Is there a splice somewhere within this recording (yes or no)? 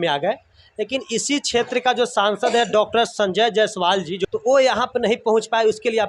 yes